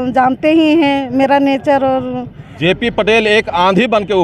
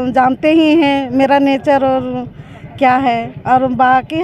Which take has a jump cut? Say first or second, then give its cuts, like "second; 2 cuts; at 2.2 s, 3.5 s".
first; 1 cut; at 2.5 s